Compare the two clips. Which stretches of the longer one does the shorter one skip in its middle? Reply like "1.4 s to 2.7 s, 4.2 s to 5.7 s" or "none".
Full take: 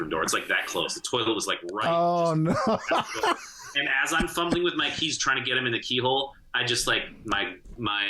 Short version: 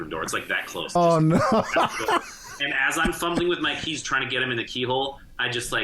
1.0 s to 2.1 s